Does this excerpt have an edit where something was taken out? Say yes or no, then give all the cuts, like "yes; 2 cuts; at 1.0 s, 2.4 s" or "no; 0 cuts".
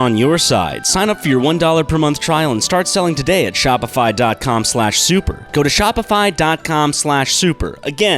no; 0 cuts